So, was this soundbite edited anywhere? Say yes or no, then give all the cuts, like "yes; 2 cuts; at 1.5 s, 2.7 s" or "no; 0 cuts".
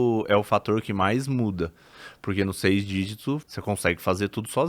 yes; 1 cut; at 3.4 s